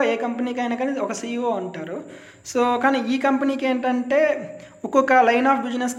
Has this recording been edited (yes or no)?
no